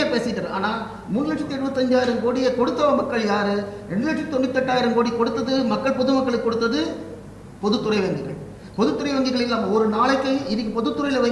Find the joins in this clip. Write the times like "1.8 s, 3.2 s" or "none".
none